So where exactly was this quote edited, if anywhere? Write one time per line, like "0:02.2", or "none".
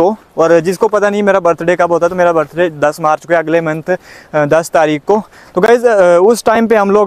none